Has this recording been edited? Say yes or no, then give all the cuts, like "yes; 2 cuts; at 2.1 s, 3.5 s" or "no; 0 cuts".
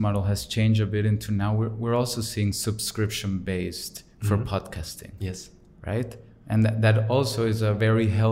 no; 0 cuts